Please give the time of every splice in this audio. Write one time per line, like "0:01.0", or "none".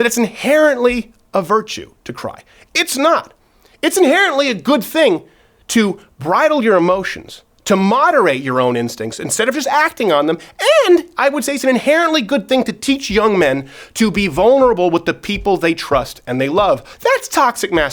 0:16.9